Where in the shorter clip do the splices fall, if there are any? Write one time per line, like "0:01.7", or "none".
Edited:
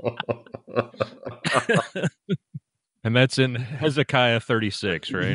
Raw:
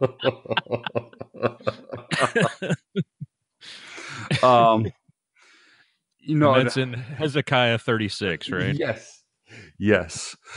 0:03.2